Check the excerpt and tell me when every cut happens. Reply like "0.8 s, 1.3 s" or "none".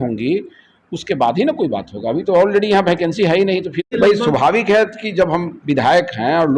3.9 s